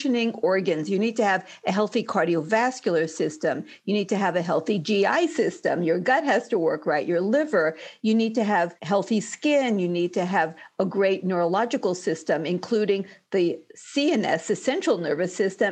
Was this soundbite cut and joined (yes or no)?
no